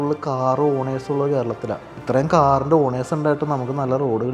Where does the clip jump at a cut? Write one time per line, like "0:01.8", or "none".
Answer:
0:01.9